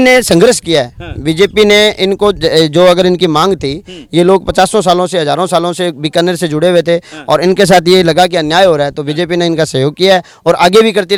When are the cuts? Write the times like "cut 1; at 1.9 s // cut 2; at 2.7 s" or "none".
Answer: none